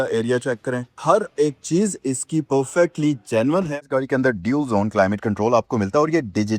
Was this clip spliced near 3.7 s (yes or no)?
yes